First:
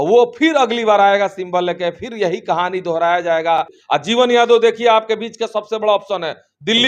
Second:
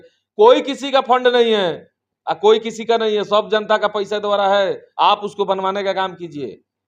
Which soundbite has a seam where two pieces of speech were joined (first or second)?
first